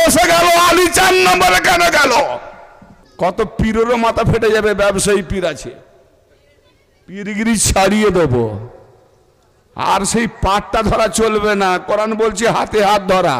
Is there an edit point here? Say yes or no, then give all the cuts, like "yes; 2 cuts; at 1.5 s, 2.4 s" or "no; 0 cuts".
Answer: yes; 1 cut; at 3.0 s